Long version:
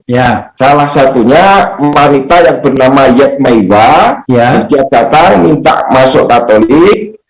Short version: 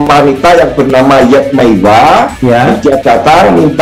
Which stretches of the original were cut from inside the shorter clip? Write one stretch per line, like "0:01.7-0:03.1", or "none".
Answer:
none